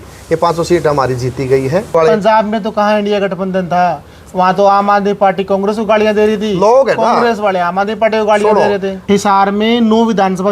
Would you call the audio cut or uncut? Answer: cut